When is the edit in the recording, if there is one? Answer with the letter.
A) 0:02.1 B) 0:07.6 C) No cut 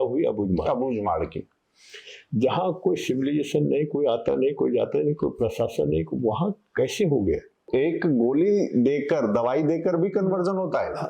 B